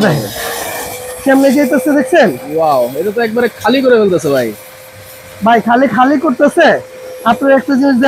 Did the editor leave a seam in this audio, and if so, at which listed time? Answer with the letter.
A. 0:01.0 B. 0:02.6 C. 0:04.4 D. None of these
D